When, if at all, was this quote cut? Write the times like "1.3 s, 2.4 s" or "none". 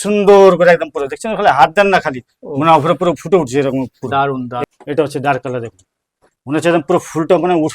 4.6 s